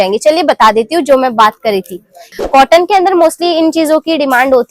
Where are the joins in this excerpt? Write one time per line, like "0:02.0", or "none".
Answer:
0:02.3